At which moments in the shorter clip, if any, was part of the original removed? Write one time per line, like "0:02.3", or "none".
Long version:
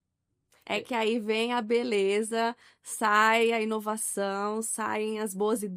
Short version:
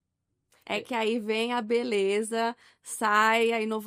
none

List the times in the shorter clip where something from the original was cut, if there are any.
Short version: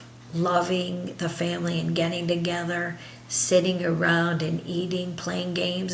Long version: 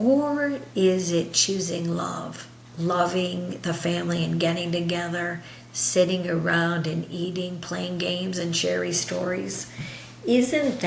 none

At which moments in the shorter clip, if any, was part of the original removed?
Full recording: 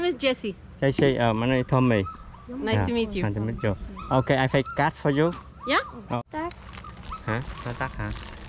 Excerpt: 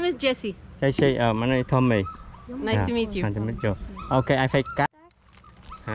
0:04.9

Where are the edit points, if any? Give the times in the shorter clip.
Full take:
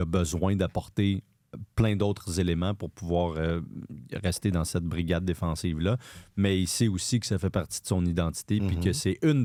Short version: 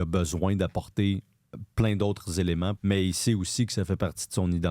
0:02.8

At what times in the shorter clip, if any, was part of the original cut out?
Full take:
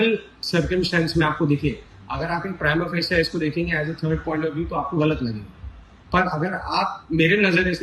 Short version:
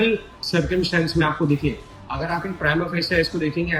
none

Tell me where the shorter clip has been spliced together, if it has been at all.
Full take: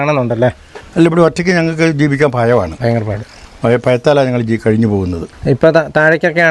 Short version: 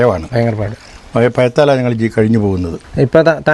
none

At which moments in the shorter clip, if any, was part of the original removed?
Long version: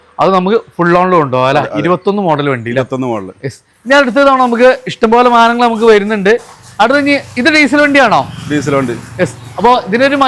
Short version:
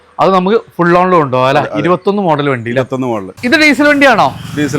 0:03.4

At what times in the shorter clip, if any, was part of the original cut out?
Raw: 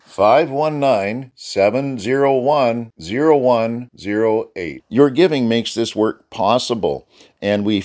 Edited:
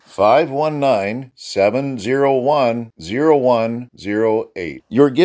none

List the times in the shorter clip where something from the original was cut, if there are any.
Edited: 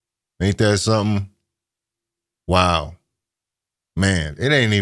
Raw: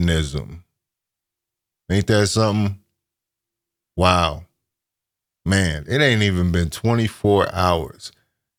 none

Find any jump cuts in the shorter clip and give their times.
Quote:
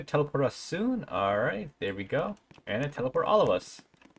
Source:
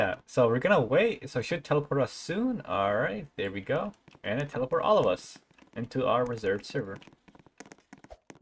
none

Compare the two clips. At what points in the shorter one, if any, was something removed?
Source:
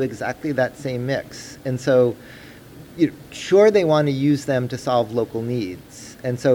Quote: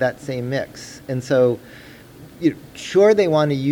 none

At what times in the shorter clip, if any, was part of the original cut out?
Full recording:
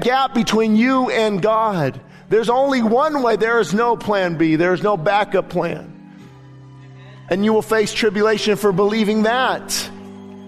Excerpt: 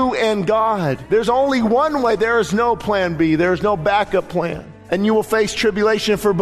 0:01.0
0:04.7

